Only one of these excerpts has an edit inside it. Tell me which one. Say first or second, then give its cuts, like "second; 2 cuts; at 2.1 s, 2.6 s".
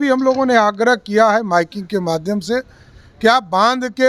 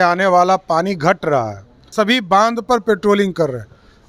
second; 1 cut; at 1.9 s